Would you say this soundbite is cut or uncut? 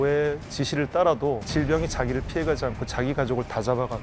cut